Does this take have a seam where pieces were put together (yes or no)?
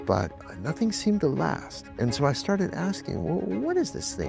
no